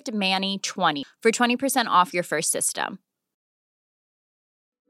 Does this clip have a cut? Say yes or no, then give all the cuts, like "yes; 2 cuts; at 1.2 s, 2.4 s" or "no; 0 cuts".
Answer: yes; 1 cut; at 1.0 s